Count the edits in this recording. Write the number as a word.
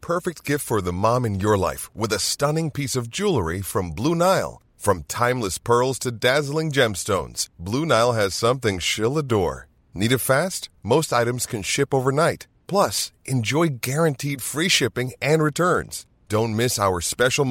zero